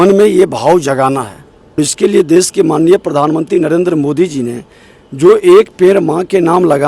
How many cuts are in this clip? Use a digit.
1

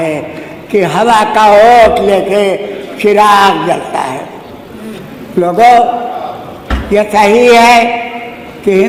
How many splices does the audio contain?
0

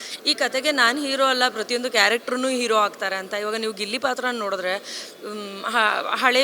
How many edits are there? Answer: 0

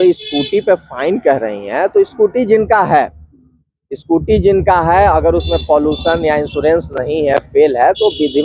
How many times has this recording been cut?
0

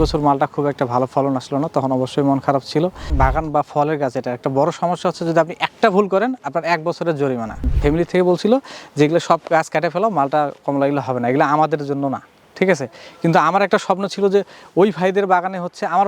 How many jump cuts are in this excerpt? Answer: 1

